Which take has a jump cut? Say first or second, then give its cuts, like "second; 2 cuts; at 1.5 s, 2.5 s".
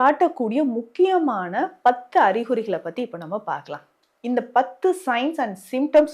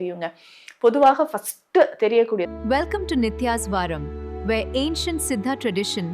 second; 1 cut; at 2.4 s